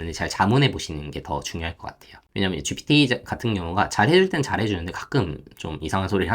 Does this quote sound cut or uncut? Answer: uncut